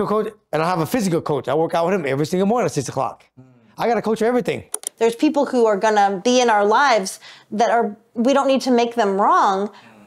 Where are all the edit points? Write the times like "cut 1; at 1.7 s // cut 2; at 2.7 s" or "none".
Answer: cut 1; at 4.9 s